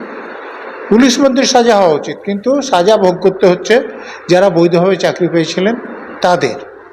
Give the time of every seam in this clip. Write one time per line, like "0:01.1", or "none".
none